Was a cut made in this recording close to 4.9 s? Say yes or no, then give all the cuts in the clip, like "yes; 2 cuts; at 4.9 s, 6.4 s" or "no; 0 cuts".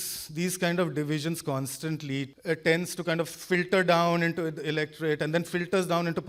no; 1 cut; at 2.3 s